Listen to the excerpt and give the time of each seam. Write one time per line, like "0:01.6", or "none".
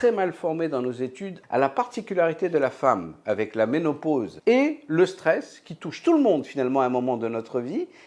0:01.4
0:04.3